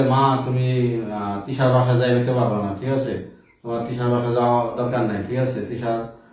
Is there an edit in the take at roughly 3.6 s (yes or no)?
no